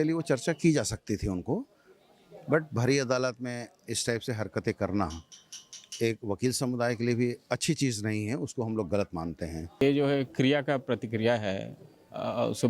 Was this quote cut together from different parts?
yes; 1 cut; at 9.8 s

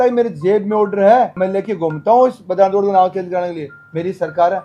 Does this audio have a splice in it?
no; 0 cuts

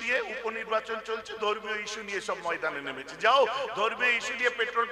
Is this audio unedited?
yes; 0 cuts

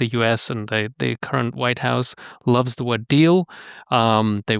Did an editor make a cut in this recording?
no; 0 cuts

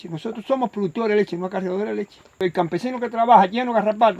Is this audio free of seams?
no; 1 cut; at 2.4 s

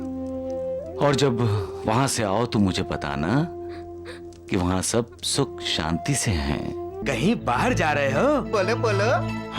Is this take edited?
yes; 1 cut; at 7.0 s

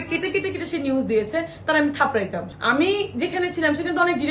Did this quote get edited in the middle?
yes; 1 cut; at 2.5 s

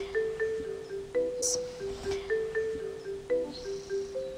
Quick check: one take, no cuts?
no; 2 cuts; at 1.5 s, 3.4 s

